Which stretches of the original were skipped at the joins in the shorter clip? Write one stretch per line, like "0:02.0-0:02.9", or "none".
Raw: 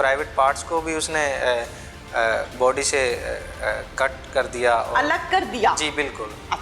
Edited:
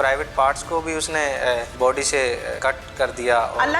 0:01.7-0:02.5
0:03.3-0:03.9